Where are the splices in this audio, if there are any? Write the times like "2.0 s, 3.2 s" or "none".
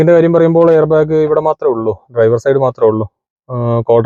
none